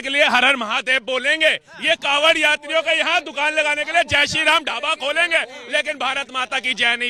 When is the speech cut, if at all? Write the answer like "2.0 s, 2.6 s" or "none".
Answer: none